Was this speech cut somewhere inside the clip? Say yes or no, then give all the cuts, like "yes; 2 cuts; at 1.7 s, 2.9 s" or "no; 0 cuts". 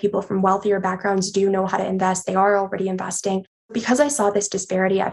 yes; 1 cut; at 3.8 s